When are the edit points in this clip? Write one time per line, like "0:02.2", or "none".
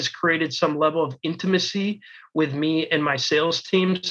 none